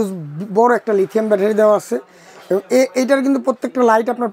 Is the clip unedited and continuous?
yes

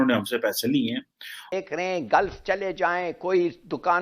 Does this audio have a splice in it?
yes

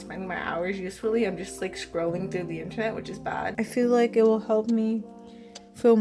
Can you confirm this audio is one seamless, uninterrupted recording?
no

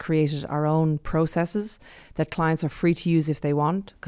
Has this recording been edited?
no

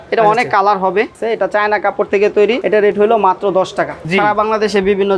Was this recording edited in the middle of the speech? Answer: yes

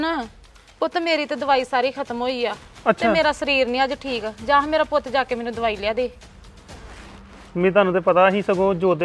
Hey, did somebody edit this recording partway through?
no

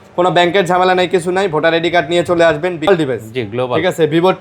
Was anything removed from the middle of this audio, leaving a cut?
yes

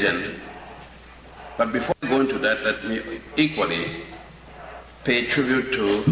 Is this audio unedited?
no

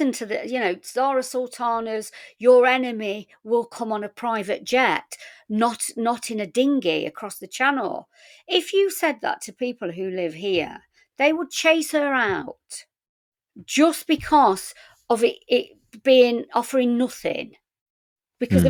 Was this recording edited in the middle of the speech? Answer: no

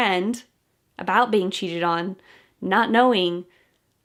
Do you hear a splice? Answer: no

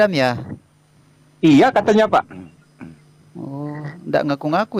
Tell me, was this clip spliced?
no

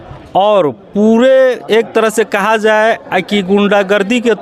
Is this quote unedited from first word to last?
yes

